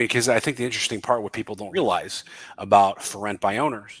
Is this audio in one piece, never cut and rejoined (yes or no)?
no